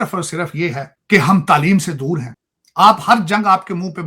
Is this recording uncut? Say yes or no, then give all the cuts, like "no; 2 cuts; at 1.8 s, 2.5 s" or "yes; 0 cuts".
no; 1 cut; at 2.3 s